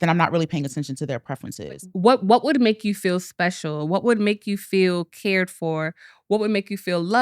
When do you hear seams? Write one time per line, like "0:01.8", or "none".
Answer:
0:01.9